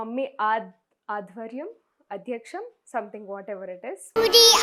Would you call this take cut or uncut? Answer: uncut